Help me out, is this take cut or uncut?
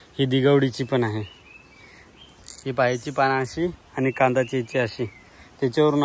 uncut